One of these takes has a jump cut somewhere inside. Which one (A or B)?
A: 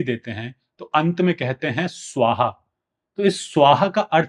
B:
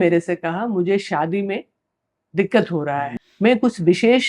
B